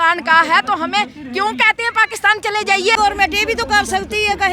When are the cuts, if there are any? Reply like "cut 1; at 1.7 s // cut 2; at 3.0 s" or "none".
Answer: cut 1; at 2.9 s